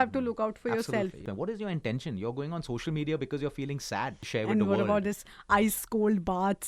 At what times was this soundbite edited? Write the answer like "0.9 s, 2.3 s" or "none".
1.2 s, 4.2 s